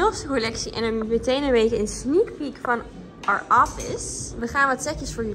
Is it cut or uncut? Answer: uncut